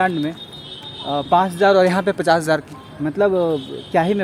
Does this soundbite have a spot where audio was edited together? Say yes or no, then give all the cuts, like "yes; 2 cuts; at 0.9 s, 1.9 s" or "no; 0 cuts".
no; 0 cuts